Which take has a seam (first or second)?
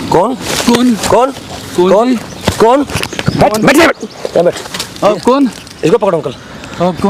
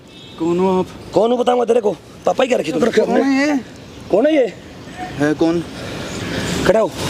second